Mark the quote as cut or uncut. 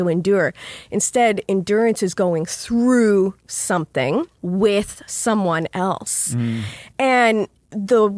uncut